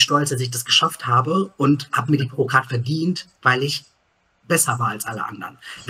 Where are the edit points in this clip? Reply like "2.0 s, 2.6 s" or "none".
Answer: none